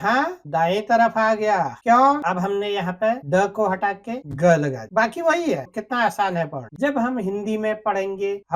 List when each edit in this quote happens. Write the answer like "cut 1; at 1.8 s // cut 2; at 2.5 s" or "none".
cut 1; at 2.2 s // cut 2; at 6.7 s